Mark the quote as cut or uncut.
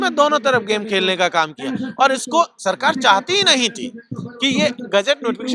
uncut